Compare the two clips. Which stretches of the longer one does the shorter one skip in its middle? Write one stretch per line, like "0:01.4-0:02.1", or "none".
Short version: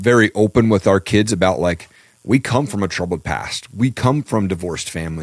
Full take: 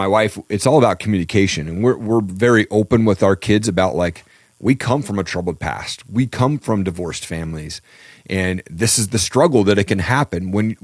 none